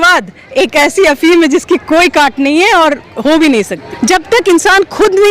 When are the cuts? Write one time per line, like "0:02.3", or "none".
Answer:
0:03.9